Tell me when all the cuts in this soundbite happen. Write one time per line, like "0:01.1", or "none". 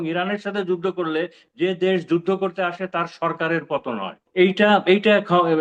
0:04.3